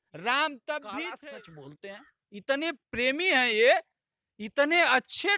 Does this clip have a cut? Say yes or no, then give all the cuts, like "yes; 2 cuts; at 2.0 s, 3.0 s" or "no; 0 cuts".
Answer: yes; 1 cut; at 1.1 s